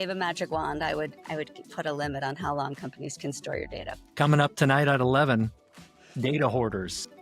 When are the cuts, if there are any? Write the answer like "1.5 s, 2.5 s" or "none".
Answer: 4.0 s